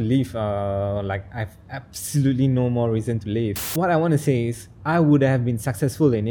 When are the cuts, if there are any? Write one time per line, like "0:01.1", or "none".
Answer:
0:03.6